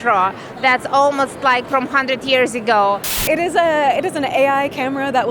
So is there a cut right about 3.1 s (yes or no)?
yes